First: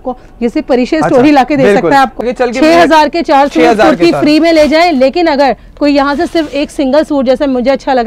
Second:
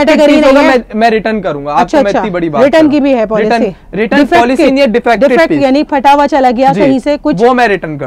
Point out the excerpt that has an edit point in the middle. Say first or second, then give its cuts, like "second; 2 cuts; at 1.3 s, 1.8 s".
first; 1 cut; at 2.2 s